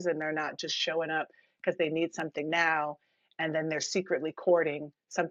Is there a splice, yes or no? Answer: no